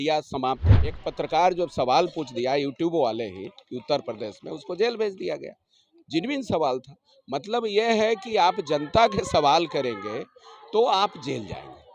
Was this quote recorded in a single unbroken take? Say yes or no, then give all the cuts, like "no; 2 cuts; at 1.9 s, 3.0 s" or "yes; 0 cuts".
no; 1 cut; at 1.0 s